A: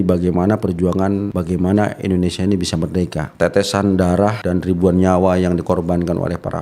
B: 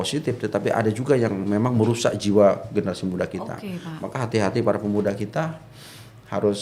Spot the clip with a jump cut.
A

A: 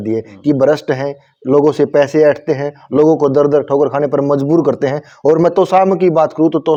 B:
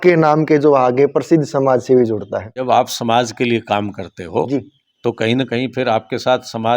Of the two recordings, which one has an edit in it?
B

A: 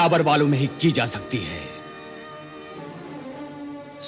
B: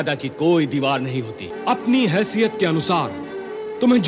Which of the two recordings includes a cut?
B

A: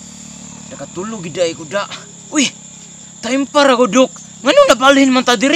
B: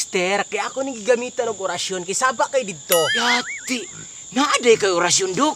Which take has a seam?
B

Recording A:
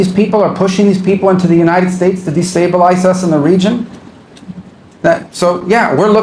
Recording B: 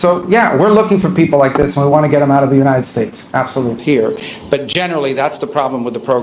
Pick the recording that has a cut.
B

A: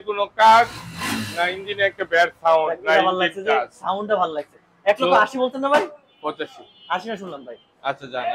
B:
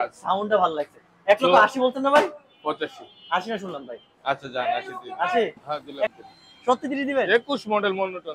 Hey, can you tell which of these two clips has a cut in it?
B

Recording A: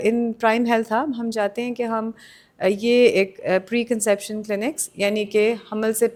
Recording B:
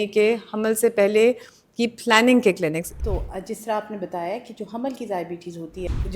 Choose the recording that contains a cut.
B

